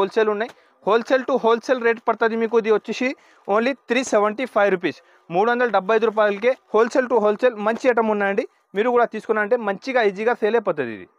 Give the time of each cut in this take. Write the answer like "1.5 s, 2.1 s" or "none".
none